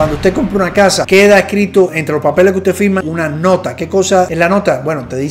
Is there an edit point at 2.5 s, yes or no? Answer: no